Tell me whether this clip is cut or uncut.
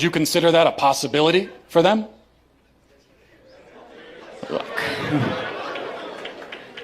cut